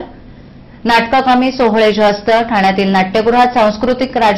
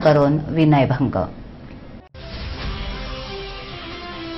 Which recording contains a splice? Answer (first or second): second